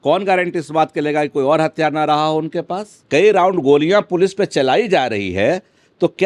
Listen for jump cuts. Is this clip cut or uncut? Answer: cut